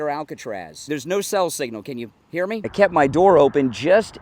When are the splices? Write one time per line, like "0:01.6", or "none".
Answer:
0:00.8
0:02.7